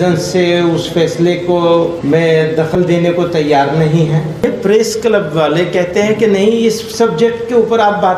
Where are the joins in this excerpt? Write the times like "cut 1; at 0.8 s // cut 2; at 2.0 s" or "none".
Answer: cut 1; at 2.5 s // cut 2; at 4.4 s